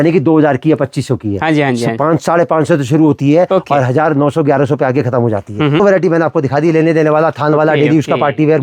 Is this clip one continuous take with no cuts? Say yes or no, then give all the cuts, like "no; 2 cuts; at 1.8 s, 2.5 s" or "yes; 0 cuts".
no; 1 cut; at 5.8 s